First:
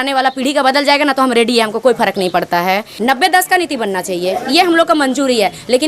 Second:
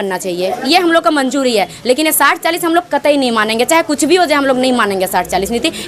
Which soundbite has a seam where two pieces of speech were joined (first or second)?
first